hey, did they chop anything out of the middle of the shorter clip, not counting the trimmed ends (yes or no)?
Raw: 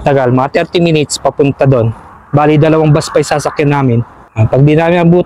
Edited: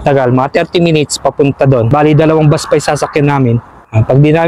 yes